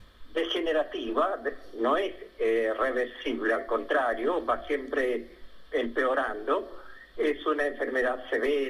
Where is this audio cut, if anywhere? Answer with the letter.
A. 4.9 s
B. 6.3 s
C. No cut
C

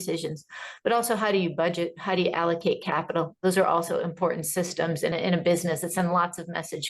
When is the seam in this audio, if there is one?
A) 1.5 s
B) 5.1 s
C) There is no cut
B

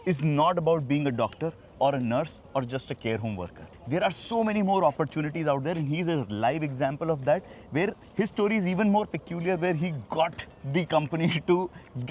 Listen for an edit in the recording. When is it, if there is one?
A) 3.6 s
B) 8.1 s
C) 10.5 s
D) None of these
D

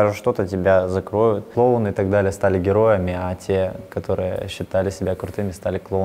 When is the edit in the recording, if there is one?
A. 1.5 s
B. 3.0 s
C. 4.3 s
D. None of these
A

